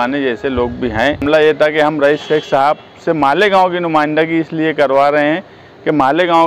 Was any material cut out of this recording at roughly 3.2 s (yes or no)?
no